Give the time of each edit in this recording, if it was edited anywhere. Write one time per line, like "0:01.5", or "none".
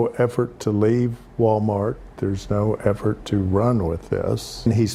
none

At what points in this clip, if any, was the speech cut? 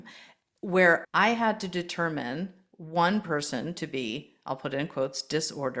0:01.0

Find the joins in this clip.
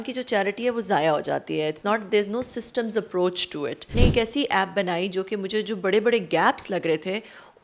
0:03.9

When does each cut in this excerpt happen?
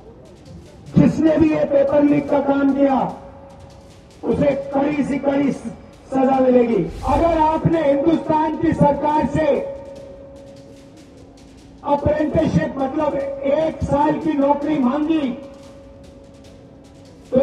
0:06.9

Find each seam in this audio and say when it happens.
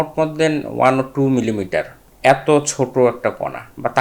0:02.0

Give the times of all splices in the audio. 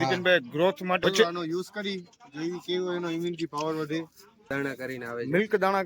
0:01.0
0:04.5

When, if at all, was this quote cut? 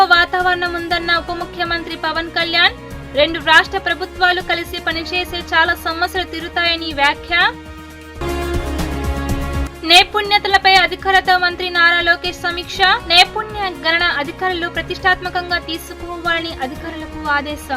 none

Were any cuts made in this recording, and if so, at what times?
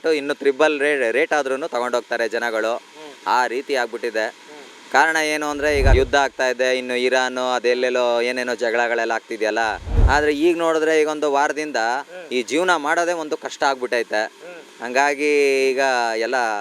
0:05.9
0:09.9

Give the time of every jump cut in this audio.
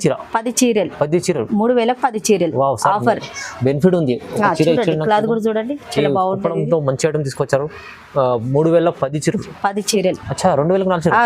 0:09.9

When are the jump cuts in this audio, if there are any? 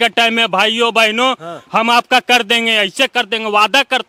none

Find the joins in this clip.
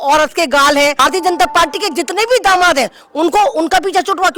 0:01.0

